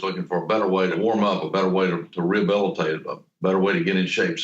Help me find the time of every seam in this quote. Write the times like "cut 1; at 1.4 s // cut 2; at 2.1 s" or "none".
cut 1; at 1.0 s